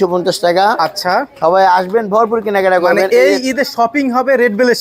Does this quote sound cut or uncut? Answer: uncut